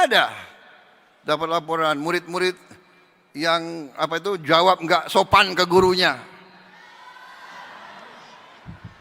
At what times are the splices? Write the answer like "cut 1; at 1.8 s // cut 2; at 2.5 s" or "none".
none